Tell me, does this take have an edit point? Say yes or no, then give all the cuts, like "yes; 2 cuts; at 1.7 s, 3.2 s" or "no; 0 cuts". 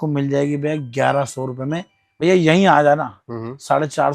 yes; 1 cut; at 2.0 s